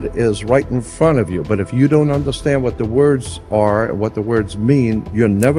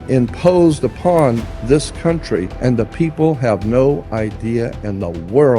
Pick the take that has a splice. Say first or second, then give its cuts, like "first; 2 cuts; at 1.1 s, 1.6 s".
second; 2 cuts; at 1.5 s, 2.5 s